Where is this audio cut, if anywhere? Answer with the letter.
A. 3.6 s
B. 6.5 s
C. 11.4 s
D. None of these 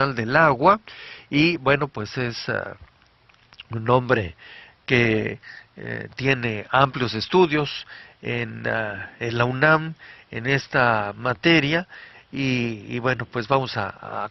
C